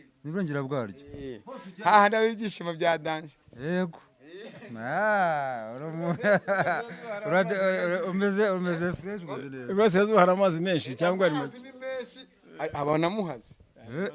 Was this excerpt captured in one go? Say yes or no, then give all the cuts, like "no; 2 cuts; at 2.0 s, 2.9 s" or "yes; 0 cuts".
yes; 0 cuts